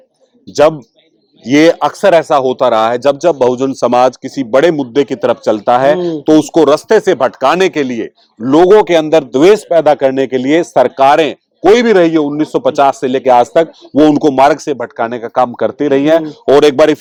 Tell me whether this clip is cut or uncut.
uncut